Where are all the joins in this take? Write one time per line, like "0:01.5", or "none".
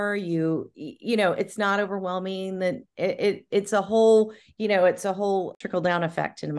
none

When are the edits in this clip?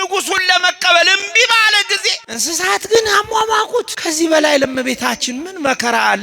0:02.3
0:04.0

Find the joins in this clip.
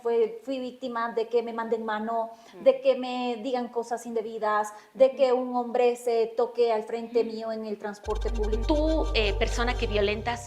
0:08.6

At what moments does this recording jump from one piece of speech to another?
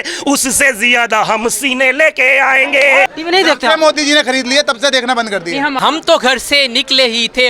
0:03.1
0:05.8

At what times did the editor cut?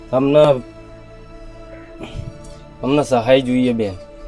none

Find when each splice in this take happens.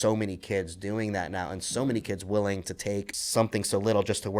0:03.2

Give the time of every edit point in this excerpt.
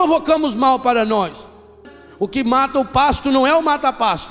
0:01.6

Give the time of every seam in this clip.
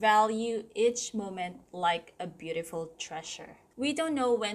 0:03.6

